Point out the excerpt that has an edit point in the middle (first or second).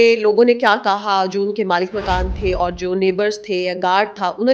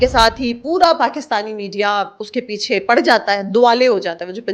second